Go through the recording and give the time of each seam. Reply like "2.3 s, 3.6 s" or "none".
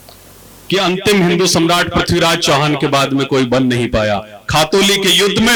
none